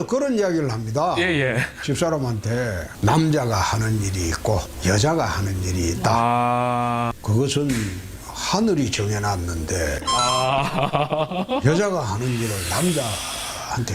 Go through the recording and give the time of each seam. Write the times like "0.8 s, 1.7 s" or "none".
7.1 s